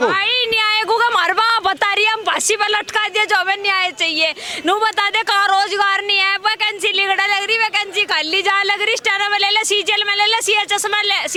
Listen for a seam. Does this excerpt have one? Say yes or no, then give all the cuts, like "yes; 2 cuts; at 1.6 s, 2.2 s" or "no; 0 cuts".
no; 0 cuts